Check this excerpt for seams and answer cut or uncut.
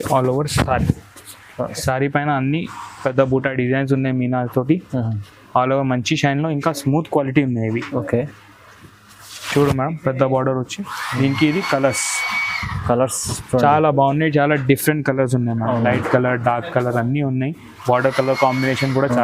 uncut